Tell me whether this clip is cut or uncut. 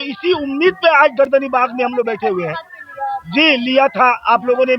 uncut